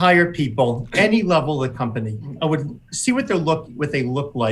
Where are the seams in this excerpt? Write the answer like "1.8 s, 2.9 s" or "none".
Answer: 0.8 s, 2.3 s